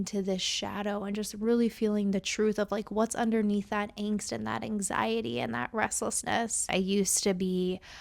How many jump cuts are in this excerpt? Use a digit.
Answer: 1